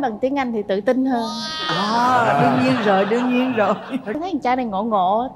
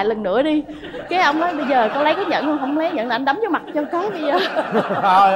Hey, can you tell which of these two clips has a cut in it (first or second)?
first